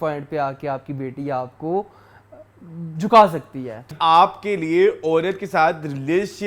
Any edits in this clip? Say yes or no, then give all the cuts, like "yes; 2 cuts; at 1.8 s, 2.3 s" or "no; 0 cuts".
yes; 1 cut; at 3.9 s